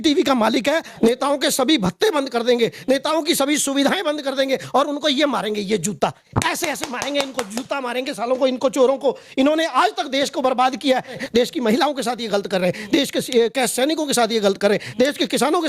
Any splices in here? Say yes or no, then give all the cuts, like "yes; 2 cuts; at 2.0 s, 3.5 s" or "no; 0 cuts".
yes; 2 cuts; at 0.9 s, 11.2 s